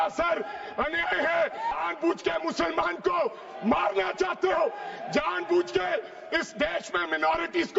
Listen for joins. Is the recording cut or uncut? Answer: cut